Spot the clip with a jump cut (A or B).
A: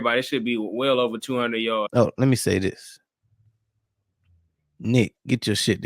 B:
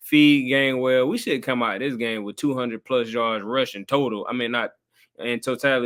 A